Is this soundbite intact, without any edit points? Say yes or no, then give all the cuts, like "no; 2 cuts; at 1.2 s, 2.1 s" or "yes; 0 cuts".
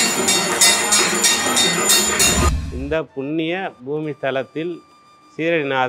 no; 1 cut; at 2.5 s